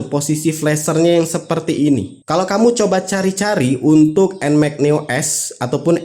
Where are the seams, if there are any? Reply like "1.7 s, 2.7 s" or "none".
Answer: 2.2 s